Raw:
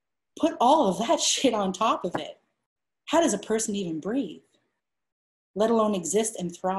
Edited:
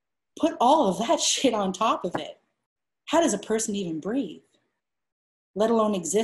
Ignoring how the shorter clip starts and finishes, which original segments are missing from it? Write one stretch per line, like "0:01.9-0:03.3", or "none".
none